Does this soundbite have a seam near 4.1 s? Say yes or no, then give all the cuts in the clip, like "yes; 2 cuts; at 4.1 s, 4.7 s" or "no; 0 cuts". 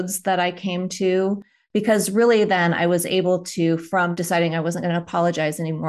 yes; 1 cut; at 4.1 s